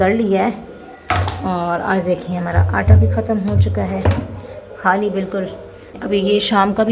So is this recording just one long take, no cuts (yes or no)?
no